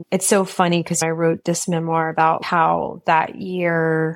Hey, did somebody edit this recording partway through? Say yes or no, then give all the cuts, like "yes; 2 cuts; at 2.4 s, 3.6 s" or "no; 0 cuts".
yes; 2 cuts; at 1.0 s, 2.4 s